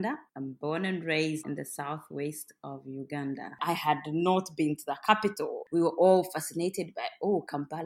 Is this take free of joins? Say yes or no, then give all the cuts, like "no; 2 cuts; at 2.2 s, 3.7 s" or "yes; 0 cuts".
no; 2 cuts; at 1.4 s, 3.6 s